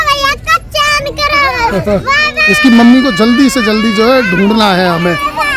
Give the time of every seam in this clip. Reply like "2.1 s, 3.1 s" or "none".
2.0 s